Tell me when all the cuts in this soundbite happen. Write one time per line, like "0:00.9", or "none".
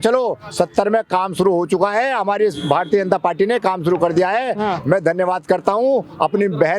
none